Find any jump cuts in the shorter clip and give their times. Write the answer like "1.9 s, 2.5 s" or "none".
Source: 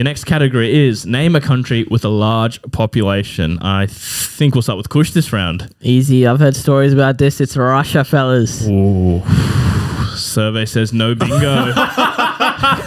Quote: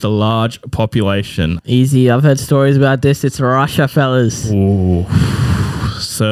1.6 s